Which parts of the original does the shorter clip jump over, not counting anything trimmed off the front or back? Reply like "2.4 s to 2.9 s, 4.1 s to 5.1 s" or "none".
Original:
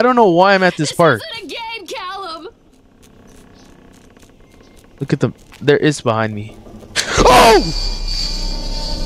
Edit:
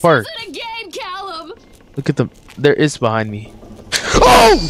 2.7 s to 4.8 s